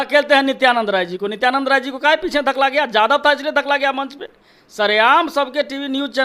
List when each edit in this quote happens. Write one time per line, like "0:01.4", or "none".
none